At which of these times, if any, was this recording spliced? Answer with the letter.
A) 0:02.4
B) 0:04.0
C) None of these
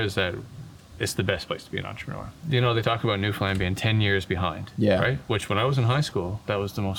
A